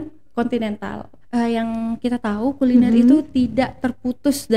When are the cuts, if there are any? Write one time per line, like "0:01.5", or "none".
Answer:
0:01.1